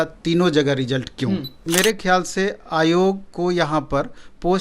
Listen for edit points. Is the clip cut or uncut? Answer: cut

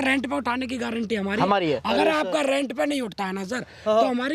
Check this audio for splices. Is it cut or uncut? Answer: uncut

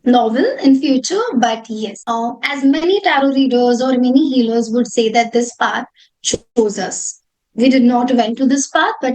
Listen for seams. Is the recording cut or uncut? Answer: cut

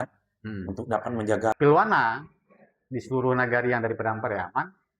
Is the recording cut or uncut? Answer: cut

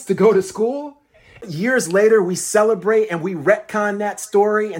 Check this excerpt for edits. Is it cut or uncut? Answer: cut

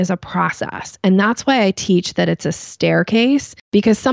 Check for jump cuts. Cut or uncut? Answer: uncut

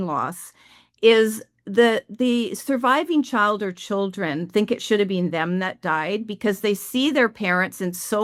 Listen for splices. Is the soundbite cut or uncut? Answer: uncut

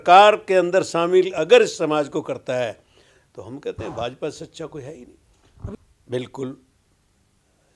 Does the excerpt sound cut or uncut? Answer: cut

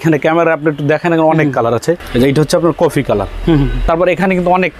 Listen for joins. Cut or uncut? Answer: cut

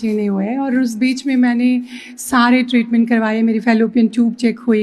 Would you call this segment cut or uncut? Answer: uncut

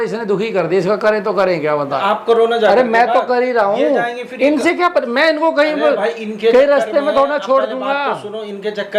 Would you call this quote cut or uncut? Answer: cut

